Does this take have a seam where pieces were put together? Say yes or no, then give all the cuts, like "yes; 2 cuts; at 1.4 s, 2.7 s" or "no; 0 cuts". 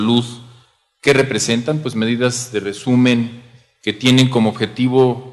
no; 0 cuts